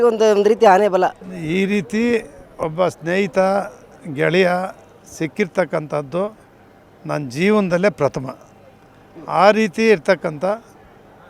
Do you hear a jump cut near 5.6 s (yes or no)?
no